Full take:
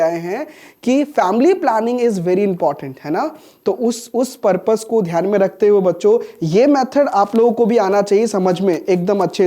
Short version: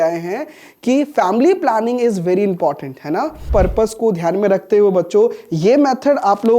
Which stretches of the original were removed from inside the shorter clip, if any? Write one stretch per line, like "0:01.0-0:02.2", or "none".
0:03.4-0:04.3